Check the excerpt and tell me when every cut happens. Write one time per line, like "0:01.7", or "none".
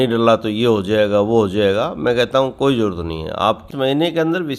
0:03.7